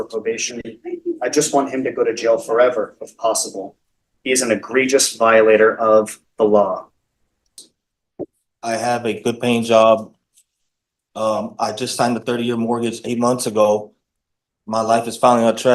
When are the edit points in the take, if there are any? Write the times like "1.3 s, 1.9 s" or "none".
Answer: 7.6 s